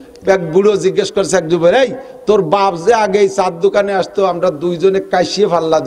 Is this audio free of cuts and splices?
yes; 0 cuts

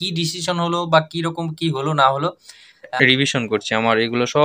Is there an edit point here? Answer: yes; 1 cut; at 2.9 s

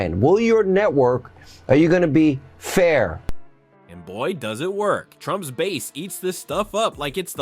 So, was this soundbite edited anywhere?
no; 0 cuts

